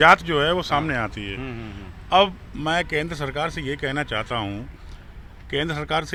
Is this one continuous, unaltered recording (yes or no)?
yes